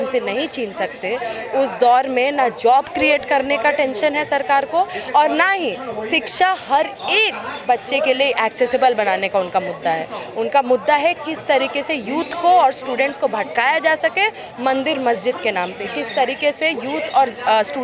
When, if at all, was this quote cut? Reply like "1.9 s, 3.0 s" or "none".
none